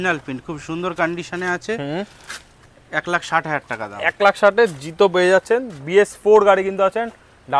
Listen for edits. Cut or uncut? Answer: uncut